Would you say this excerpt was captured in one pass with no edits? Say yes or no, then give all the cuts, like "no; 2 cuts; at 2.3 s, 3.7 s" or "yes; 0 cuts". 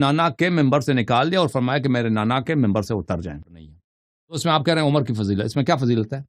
no; 1 cut; at 3.6 s